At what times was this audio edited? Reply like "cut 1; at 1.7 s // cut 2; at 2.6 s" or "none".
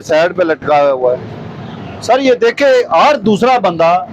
none